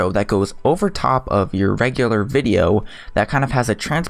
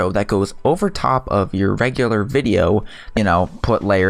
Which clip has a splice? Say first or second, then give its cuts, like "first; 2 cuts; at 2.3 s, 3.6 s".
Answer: first; 1 cut; at 3.1 s